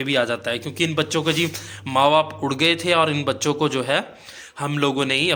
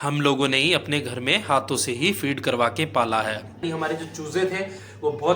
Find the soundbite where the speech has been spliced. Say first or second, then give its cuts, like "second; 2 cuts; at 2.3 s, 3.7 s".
second; 1 cut; at 3.6 s